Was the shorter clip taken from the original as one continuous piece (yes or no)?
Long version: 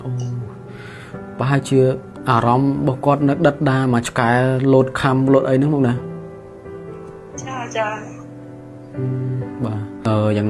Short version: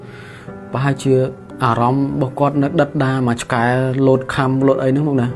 yes